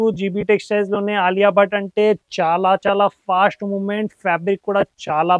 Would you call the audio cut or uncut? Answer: uncut